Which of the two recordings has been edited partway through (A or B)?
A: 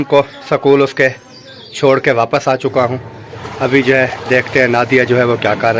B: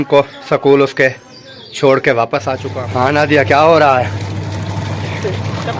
B